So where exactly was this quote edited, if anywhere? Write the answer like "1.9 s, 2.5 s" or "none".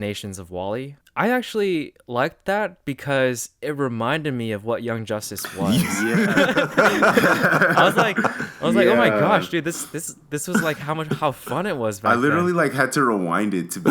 1.0 s